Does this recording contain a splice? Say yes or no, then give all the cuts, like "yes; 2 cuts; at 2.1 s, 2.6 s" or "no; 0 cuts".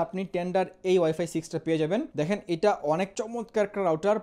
yes; 2 cuts; at 2.1 s, 3.2 s